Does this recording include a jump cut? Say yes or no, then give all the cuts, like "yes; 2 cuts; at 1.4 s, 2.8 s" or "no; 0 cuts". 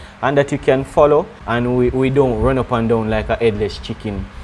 yes; 1 cut; at 1.4 s